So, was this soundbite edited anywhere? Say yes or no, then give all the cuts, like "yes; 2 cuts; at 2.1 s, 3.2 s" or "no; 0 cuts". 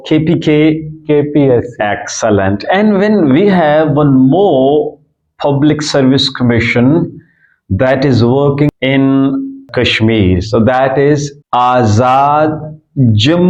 no; 0 cuts